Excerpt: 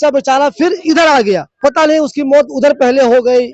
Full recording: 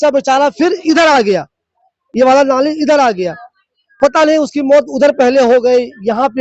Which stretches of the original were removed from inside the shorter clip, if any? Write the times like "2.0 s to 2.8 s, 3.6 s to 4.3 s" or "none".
1.5 s to 3.9 s